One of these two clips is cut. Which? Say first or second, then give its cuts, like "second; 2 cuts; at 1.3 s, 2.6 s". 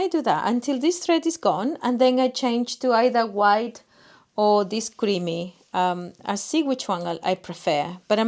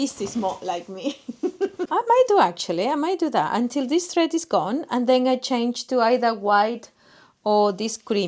second; 1 cut; at 1.9 s